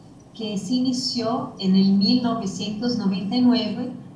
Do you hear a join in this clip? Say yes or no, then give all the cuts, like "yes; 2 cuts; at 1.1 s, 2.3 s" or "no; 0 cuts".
yes; 1 cut; at 1.5 s